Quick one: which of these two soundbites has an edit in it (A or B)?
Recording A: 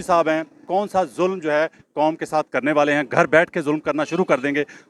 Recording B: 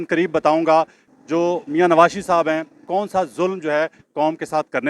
B